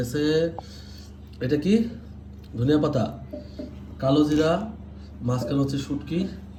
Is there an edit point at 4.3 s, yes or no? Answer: no